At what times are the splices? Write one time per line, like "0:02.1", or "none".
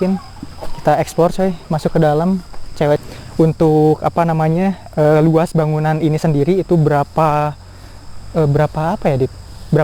0:03.0